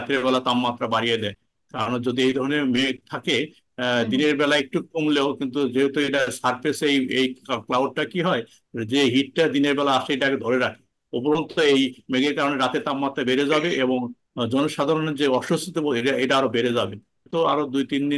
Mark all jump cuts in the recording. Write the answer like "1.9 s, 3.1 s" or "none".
17.3 s